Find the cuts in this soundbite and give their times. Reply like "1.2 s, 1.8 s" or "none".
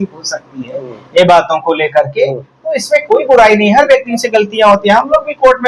none